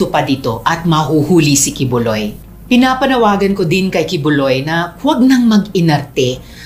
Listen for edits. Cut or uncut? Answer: cut